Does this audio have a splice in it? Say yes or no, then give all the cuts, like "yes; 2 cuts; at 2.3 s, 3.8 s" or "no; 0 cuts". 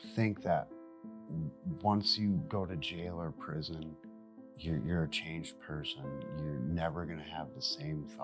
no; 0 cuts